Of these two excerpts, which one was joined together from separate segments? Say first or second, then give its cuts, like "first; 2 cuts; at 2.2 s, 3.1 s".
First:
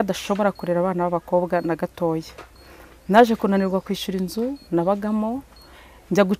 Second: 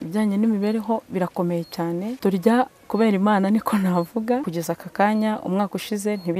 second; 2 cuts; at 2.1 s, 4.5 s